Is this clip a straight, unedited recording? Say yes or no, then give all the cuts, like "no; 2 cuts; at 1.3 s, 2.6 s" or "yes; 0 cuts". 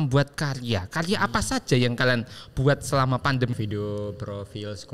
no; 1 cut; at 3.5 s